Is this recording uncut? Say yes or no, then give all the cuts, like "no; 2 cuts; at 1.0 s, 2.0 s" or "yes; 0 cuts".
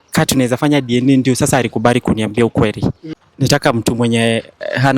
no; 1 cut; at 3.1 s